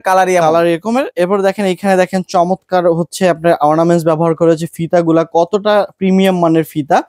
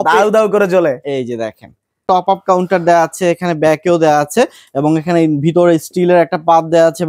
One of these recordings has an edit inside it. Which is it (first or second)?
second